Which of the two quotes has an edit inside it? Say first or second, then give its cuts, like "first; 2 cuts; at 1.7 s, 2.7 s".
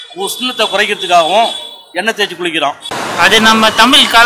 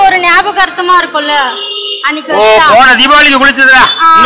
first; 1 cut; at 3.0 s